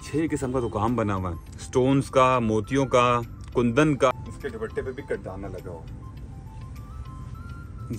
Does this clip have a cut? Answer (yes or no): yes